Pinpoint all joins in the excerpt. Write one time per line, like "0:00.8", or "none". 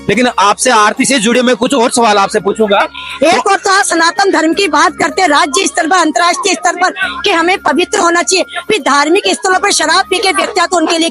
0:03.0